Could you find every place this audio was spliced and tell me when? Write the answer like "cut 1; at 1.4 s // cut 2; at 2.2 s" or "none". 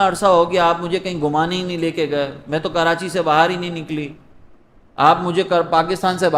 none